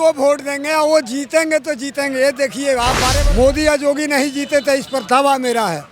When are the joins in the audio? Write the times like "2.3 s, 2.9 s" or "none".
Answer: 3.2 s